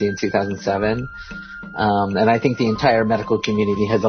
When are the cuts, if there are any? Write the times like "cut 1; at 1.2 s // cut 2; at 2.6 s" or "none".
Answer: none